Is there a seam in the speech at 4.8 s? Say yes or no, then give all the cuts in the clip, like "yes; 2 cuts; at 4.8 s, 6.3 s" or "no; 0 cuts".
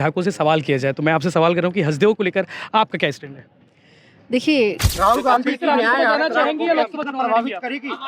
yes; 1 cut; at 4.8 s